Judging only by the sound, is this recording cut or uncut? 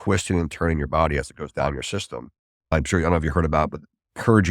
cut